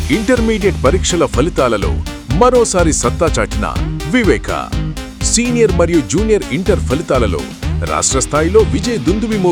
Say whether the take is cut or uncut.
uncut